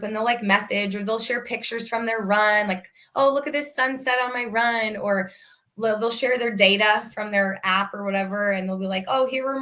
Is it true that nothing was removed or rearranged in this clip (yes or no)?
yes